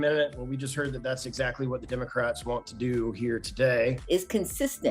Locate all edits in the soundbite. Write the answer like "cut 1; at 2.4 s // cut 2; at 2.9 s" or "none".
cut 1; at 4.0 s